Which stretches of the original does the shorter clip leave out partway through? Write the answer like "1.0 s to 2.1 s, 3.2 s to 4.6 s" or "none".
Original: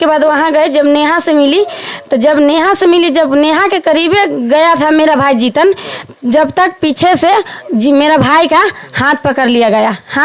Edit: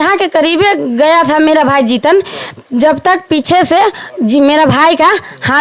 none